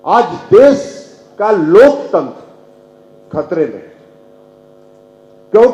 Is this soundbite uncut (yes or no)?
yes